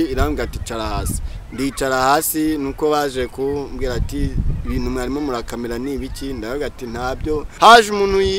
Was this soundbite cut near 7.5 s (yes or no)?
yes